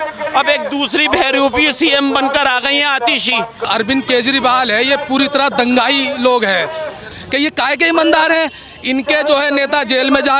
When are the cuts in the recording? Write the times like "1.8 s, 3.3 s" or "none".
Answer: 3.6 s, 7.1 s